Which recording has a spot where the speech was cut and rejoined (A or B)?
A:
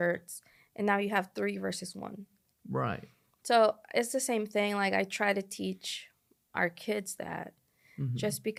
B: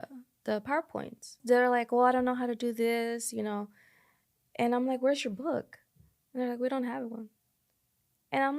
B